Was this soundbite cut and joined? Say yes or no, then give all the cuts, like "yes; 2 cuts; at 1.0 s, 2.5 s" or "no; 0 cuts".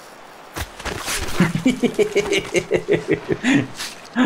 yes; 1 cut; at 1.4 s